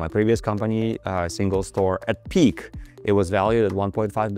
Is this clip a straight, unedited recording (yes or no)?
yes